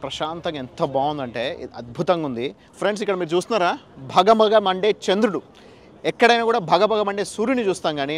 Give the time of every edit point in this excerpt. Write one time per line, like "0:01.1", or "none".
0:02.6